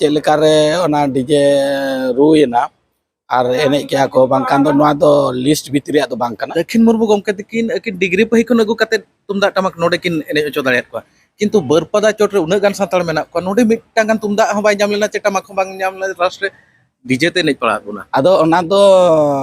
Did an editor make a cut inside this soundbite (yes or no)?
yes